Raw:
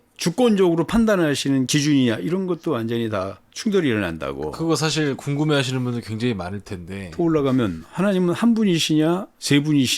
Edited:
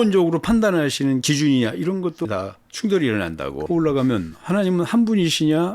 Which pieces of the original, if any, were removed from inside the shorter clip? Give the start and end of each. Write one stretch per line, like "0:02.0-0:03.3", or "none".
0:02.7-0:03.1
0:04.4-0:07.1

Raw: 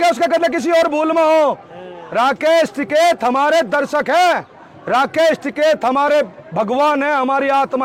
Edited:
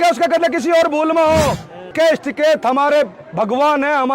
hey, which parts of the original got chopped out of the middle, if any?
0:01.9-0:05.1

